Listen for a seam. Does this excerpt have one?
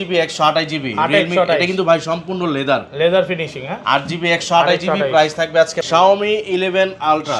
yes; 1 cut; at 5.8 s

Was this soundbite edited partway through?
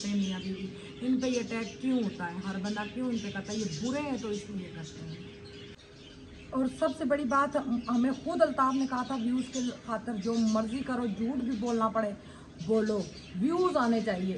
yes; 1 cut; at 5.8 s

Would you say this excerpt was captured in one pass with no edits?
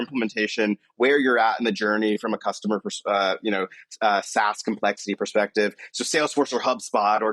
yes; 0 cuts

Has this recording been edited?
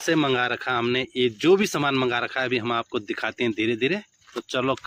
no; 0 cuts

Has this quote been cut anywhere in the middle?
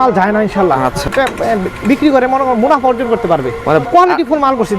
yes; 2 cuts; at 1.1 s, 3.9 s

